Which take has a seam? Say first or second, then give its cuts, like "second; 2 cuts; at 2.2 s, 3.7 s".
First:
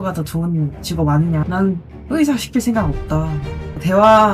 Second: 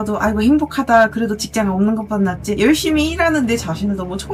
first; 1 cut; at 1.7 s